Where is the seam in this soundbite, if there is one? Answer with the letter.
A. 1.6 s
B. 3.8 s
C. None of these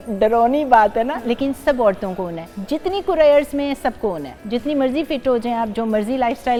C